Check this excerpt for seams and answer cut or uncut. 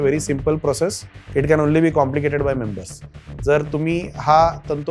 cut